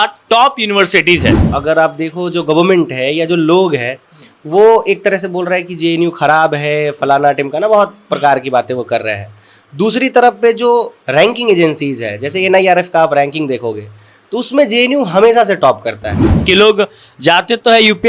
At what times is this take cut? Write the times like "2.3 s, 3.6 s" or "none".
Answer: 1.5 s, 16.4 s